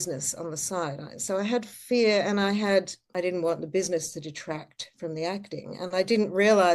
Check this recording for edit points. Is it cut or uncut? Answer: cut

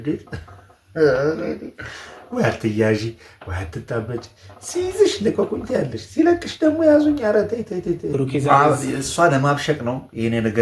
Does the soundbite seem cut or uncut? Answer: cut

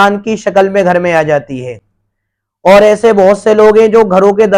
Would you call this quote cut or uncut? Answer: uncut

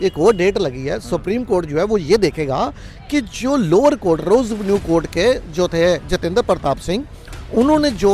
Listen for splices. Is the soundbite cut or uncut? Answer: uncut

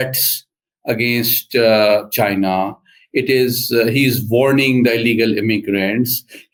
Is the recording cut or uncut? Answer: uncut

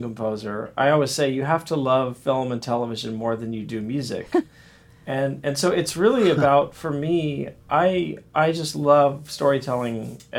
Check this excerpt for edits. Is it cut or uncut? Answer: uncut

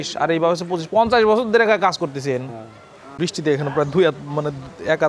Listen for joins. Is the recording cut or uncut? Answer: cut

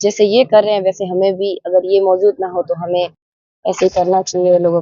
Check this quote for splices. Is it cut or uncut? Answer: uncut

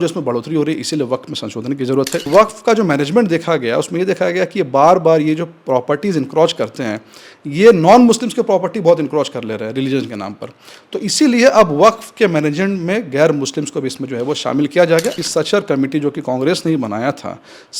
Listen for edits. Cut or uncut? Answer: cut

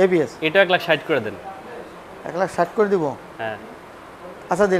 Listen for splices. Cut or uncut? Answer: uncut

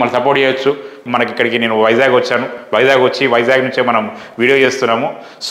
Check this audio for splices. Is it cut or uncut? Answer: cut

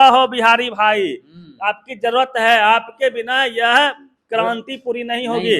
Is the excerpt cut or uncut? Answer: uncut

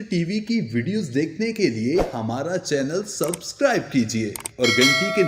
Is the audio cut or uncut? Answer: uncut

